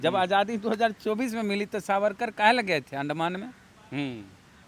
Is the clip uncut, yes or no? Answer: yes